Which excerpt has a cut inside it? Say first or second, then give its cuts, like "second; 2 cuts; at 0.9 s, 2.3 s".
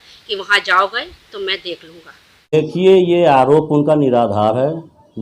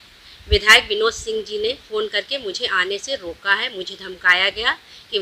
first; 1 cut; at 2.6 s